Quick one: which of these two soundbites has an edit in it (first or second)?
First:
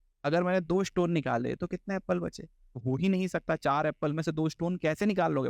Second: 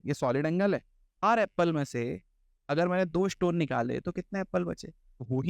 second